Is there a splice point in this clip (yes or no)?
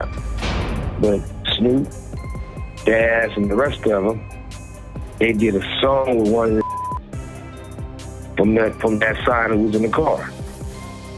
no